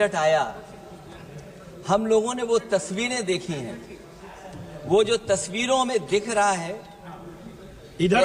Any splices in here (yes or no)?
no